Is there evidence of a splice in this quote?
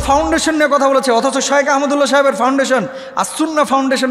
no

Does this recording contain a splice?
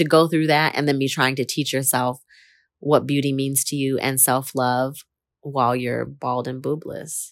no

